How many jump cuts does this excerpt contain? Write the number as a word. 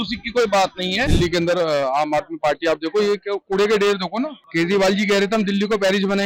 two